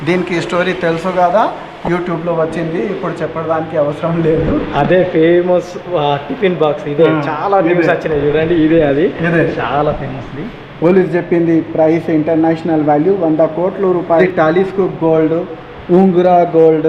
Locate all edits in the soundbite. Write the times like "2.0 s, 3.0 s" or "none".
14.2 s